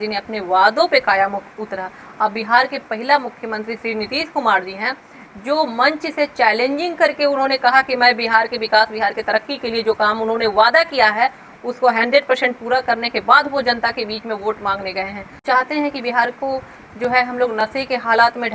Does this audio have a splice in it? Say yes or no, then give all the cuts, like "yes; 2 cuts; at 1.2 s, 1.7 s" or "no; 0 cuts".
yes; 1 cut; at 15.4 s